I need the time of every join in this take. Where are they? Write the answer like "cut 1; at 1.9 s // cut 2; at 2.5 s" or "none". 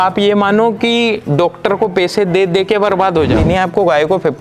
cut 1; at 3.4 s

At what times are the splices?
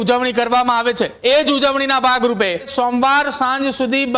cut 1; at 1.1 s // cut 2; at 2.7 s

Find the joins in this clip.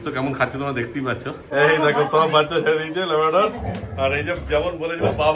cut 1; at 1.4 s

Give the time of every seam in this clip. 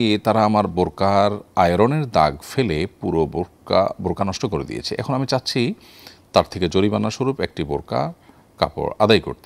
none

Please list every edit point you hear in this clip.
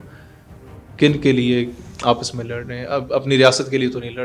cut 1; at 1.8 s

